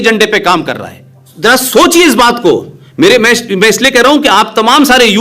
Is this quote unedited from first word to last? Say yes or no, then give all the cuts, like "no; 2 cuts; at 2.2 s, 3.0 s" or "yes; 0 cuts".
no; 1 cut; at 1.3 s